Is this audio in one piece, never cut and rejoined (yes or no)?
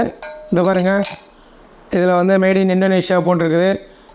yes